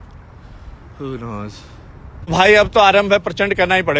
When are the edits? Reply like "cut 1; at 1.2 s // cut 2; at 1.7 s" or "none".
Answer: cut 1; at 2.3 s